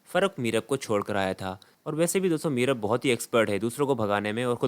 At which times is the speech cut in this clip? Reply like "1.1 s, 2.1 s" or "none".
1.7 s